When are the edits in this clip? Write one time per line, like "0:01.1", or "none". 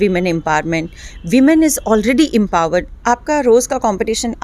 0:02.9